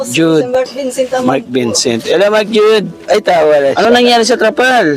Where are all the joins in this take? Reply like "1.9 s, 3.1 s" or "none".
3.8 s